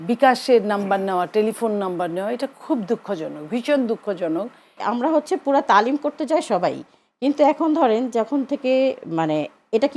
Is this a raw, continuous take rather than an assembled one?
no; 1 cut; at 4.8 s

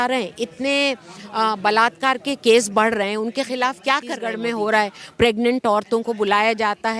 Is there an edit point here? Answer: yes; 1 cut; at 4.4 s

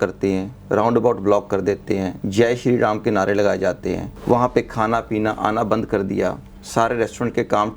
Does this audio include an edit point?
yes; 1 cut; at 4.1 s

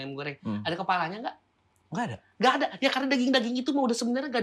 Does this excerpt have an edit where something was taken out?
no; 0 cuts

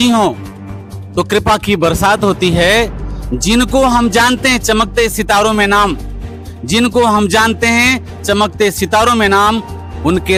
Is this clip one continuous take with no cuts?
yes; 0 cuts

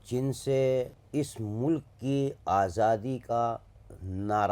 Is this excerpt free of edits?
no; 1 cut; at 1.0 s

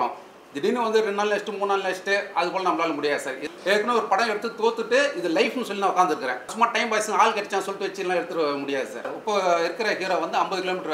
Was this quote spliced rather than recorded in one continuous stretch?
yes; 3 cuts; at 3.5 s, 6.5 s, 9.1 s

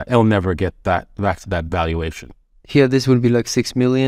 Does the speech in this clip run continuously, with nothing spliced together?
yes; 0 cuts

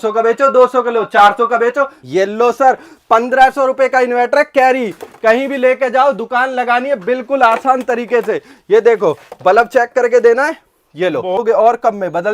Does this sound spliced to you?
yes; 2 cuts; at 2.0 s, 11.4 s

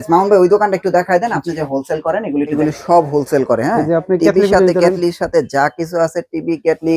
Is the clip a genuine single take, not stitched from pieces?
no; 1 cut; at 2.5 s

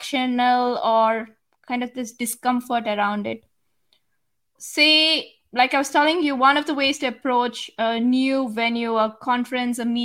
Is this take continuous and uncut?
yes; 0 cuts

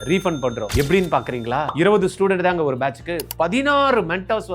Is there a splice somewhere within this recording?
no; 0 cuts

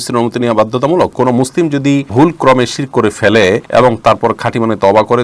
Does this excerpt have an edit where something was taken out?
yes; 3 cuts; at 1.1 s, 2.1 s, 3.6 s

